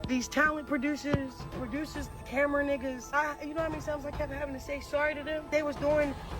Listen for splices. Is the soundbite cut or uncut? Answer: cut